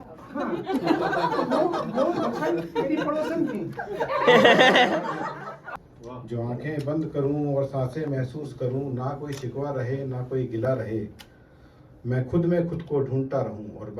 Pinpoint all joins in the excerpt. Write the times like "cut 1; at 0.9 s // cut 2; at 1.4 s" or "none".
cut 1; at 5.7 s